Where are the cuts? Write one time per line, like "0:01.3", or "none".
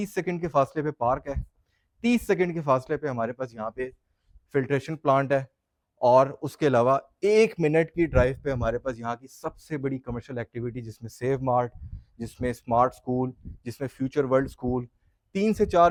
none